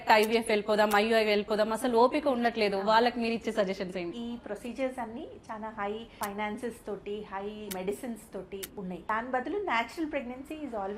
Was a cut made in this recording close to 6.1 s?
yes; 4 cuts; at 4.1 s, 6.1 s, 7.7 s, 9.0 s

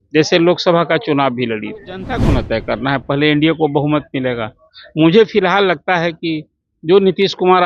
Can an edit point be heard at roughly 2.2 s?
yes; 1 cut; at 2.2 s

